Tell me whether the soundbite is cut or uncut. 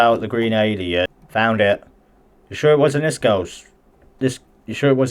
cut